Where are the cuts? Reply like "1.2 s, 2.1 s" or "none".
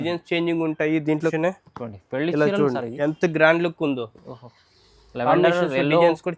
1.3 s